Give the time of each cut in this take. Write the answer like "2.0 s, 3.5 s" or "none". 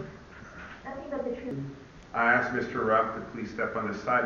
1.5 s